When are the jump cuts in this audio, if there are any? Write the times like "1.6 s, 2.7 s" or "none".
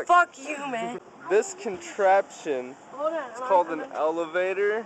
0.9 s